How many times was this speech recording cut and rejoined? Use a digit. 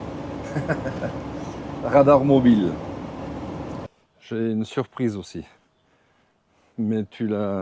1